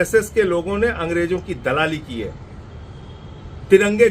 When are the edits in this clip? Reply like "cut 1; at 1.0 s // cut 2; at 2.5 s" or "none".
none